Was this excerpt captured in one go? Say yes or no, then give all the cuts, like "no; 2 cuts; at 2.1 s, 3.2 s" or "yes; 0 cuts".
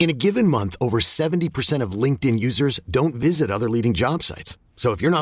yes; 0 cuts